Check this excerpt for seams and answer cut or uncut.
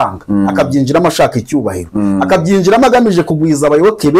uncut